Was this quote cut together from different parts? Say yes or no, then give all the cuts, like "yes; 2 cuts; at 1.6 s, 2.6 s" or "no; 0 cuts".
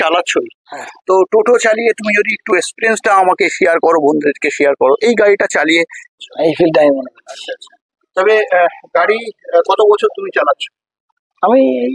yes; 1 cut; at 6.0 s